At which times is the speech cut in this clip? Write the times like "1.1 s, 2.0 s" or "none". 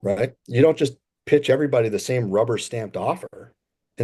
none